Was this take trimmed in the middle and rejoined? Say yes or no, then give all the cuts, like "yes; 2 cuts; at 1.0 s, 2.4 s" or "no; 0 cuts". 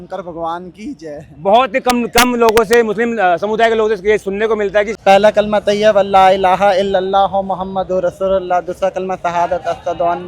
yes; 1 cut; at 4.9 s